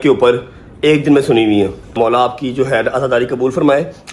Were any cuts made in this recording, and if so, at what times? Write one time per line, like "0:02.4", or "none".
0:01.9